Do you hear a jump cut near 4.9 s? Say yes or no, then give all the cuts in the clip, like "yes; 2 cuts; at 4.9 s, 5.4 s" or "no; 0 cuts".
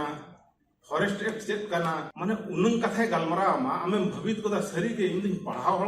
no; 1 cut; at 2.1 s